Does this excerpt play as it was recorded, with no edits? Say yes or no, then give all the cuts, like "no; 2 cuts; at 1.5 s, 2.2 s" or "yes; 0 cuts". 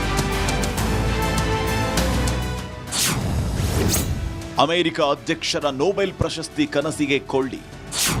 no; 1 cut; at 2.3 s